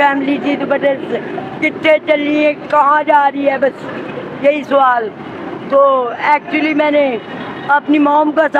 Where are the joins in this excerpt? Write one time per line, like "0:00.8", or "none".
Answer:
none